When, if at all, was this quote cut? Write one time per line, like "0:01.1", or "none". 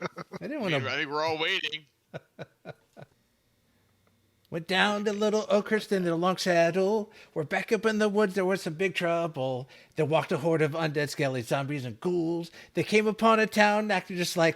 0:03.3